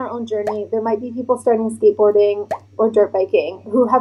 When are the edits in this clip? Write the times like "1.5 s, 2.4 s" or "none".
none